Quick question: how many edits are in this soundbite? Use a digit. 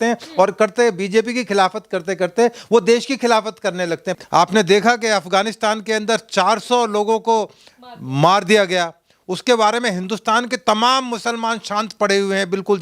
1